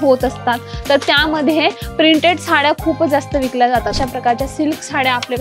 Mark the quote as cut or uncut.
cut